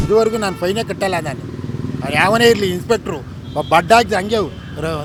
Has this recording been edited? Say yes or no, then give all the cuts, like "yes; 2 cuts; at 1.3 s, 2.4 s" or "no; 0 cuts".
no; 0 cuts